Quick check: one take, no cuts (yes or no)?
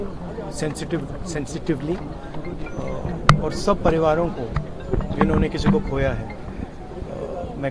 yes